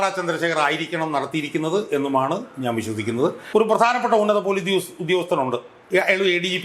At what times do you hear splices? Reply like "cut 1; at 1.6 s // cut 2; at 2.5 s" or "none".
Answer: cut 1; at 3.4 s